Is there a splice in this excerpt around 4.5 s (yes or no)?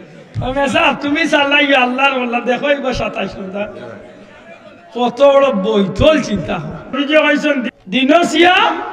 no